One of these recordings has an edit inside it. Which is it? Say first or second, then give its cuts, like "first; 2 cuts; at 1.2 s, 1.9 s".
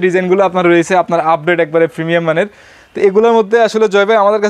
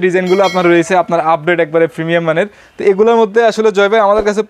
second; 1 cut; at 2.6 s